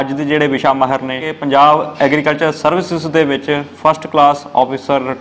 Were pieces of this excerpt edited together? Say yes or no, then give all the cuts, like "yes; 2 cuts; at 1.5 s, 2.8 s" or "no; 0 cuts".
yes; 1 cut; at 1.3 s